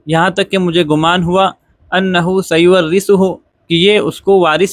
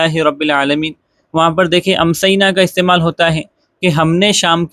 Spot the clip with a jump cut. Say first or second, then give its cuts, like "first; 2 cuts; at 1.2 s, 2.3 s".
first; 1 cut; at 3.8 s